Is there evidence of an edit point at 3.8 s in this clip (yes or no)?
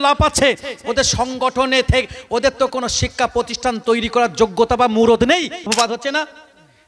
no